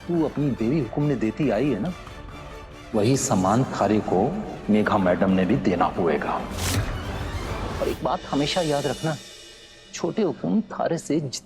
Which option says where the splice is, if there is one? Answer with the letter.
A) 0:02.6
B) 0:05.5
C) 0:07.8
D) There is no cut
C